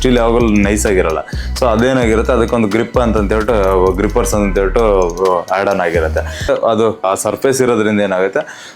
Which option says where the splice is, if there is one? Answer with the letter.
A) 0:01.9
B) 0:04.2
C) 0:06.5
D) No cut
C